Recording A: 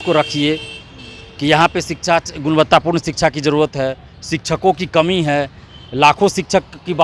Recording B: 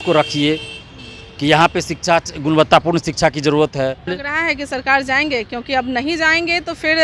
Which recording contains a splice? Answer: B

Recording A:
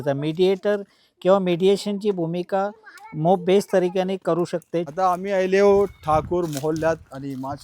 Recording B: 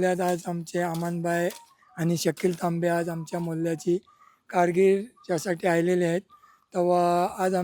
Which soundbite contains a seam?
A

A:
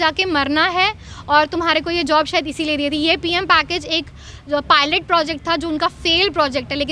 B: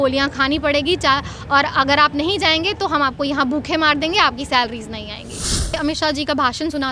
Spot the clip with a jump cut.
B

